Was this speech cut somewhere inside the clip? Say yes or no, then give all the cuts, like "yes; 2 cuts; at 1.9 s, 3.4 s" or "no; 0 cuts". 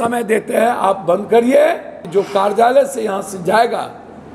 yes; 1 cut; at 2.0 s